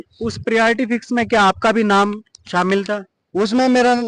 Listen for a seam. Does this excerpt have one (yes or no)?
no